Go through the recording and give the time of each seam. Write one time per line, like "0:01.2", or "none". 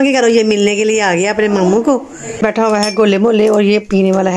0:02.4